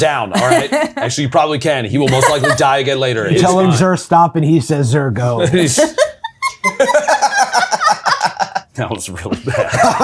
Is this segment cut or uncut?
cut